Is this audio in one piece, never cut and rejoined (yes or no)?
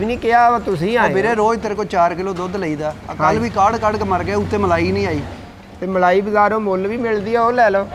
yes